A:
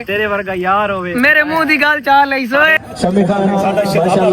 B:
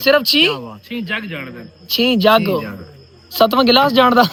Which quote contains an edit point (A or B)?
A